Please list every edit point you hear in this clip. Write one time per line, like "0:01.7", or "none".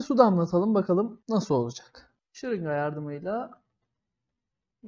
none